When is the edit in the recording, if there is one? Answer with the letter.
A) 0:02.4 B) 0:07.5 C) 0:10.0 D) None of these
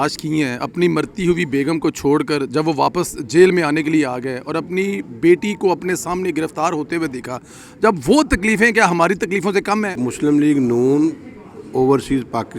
C